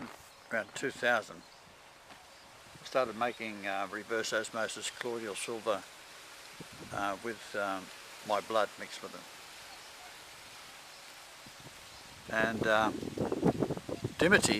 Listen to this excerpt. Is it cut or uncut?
cut